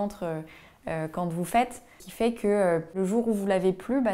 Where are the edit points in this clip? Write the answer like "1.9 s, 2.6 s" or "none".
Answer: 2.0 s, 3.0 s